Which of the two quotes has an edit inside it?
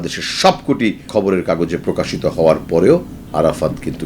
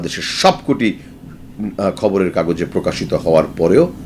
first; 2 cuts; at 1.1 s, 3.2 s

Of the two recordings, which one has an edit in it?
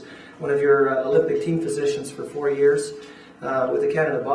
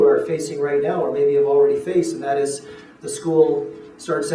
first; 1 cut; at 1.2 s

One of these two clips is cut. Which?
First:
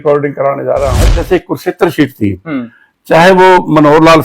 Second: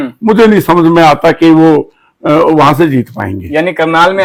first; 1 cut; at 1.2 s

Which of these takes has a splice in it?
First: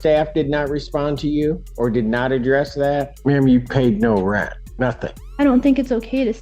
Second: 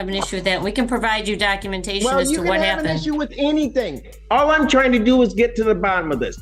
first; 3 cuts; at 1.7 s, 3.1 s, 4.9 s

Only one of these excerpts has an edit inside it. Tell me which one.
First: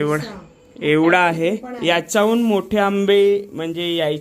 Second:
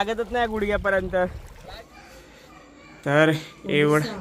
second; 1 cut; at 1.5 s

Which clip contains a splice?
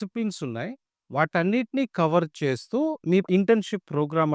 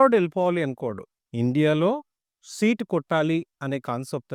first; 1 cut; at 3.3 s

